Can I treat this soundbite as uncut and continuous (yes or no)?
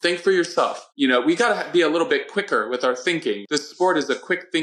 yes